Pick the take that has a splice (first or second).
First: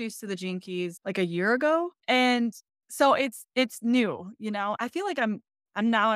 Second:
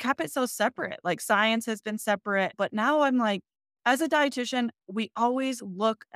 first